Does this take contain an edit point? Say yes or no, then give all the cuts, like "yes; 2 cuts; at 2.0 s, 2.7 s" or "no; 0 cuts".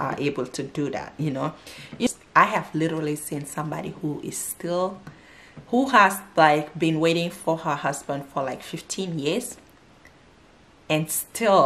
yes; 1 cut; at 2.1 s